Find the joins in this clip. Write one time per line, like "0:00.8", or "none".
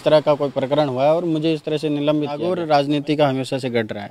0:02.5